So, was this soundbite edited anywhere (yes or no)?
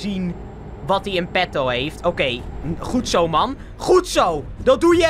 no